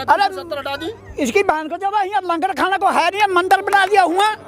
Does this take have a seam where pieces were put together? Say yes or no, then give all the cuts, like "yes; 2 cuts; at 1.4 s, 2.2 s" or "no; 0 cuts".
no; 0 cuts